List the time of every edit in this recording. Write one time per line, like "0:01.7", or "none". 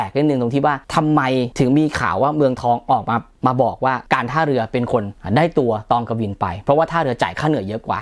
none